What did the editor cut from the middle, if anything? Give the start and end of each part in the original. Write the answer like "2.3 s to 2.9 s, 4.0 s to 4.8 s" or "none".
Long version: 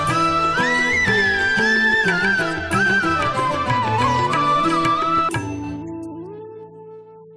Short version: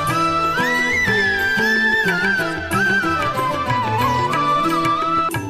none